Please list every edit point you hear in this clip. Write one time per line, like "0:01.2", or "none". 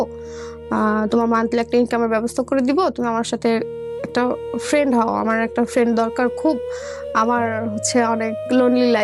none